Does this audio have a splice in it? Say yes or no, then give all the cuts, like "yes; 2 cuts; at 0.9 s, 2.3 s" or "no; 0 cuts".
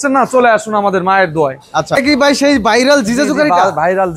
yes; 1 cut; at 2.0 s